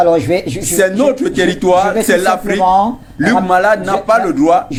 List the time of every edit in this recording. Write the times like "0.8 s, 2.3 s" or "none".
none